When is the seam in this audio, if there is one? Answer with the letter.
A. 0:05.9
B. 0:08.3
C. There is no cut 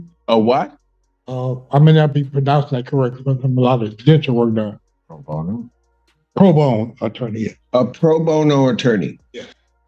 C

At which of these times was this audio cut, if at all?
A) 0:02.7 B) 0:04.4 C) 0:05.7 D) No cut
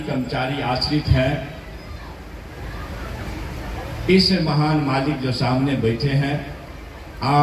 D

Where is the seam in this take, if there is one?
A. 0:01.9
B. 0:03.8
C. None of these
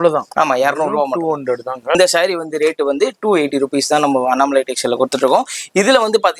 A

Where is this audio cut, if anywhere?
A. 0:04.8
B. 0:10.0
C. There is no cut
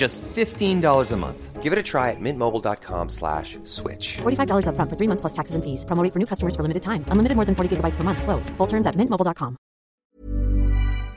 B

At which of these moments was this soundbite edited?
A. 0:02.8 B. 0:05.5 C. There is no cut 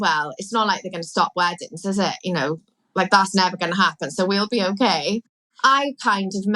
B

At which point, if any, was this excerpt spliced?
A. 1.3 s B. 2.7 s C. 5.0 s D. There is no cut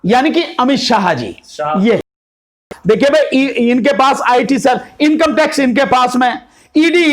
B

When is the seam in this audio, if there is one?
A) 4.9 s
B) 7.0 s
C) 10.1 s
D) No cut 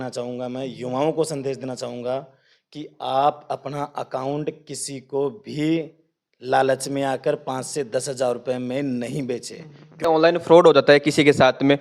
C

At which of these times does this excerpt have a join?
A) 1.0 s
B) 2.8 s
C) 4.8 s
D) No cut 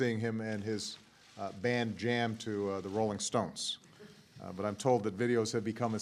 B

